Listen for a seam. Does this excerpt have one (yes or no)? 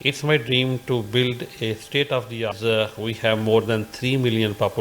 yes